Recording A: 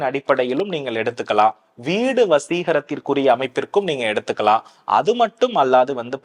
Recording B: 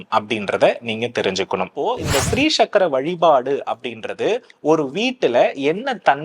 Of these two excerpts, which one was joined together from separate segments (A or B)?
B